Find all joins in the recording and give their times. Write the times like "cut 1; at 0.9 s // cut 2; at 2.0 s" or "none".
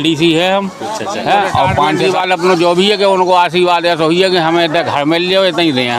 cut 1; at 2.0 s